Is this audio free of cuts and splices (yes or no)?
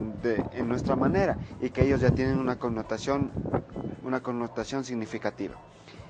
no